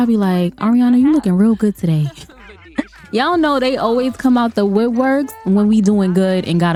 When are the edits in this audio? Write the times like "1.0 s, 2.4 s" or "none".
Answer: none